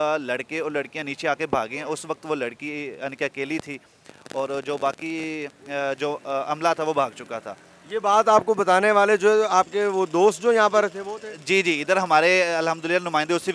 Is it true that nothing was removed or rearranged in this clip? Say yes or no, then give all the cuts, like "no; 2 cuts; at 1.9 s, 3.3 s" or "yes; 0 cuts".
yes; 0 cuts